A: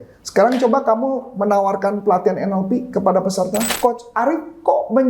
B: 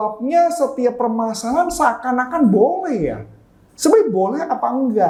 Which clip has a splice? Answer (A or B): A